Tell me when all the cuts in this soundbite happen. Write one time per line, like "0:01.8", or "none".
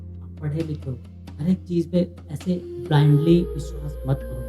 none